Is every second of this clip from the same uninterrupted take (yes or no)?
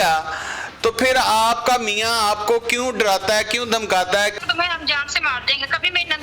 no